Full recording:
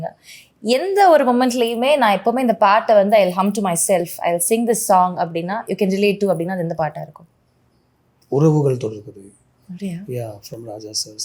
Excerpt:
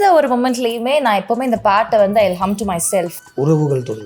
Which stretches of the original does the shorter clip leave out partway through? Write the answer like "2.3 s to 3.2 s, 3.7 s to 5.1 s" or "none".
4.1 s to 8.1 s